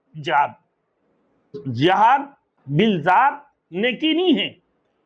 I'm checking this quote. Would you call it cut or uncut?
cut